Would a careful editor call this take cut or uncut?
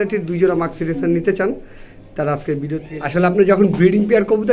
cut